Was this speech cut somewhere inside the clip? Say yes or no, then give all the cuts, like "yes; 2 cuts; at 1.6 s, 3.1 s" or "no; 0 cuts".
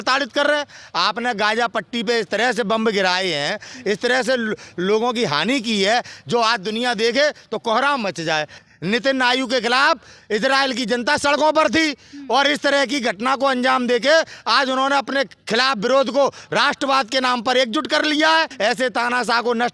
yes; 2 cuts; at 8.5 s, 18.5 s